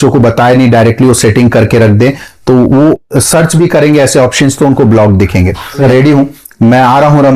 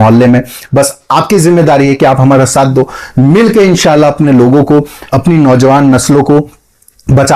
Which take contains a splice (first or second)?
first